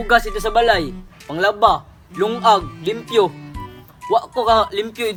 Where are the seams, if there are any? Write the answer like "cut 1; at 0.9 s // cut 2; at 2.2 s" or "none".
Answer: none